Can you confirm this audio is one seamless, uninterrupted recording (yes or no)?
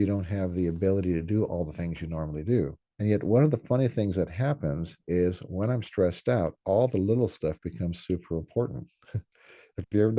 no